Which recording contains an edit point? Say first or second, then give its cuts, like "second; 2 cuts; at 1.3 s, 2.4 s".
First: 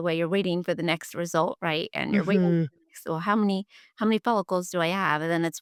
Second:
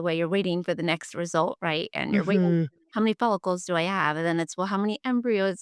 second; 1 cut; at 2.8 s